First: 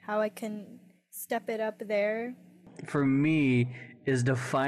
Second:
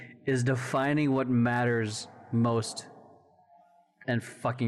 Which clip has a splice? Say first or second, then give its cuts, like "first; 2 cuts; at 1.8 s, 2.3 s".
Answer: first; 1 cut; at 2.7 s